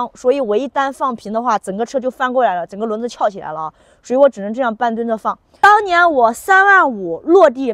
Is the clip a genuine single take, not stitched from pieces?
no; 1 cut; at 5.4 s

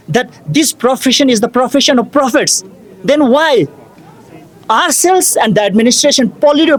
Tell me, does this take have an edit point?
no; 0 cuts

